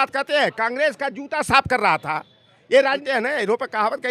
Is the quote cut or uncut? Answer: cut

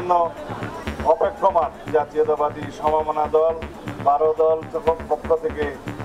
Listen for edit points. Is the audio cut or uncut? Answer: cut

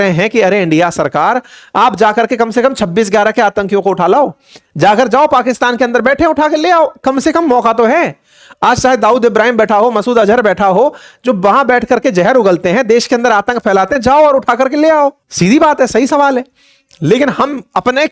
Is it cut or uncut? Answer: cut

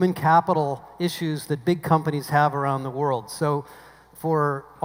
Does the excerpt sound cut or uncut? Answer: uncut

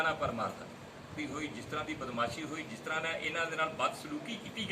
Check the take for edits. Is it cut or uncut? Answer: cut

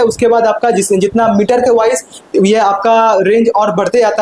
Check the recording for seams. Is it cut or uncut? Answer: uncut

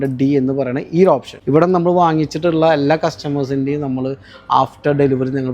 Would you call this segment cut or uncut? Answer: cut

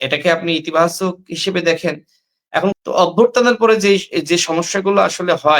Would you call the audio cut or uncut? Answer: cut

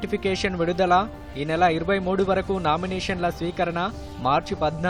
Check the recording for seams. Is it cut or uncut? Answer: uncut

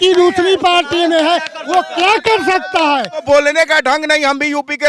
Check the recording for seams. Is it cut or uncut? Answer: cut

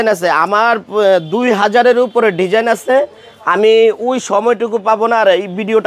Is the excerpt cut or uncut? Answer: uncut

